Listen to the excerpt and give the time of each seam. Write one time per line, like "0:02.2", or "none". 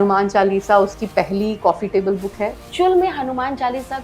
0:02.6